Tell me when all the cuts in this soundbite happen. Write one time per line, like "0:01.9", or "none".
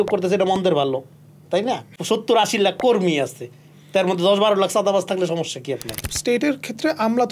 0:01.9
0:06.0